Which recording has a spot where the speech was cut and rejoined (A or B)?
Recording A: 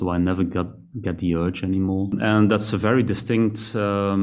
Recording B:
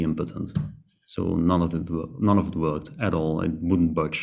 A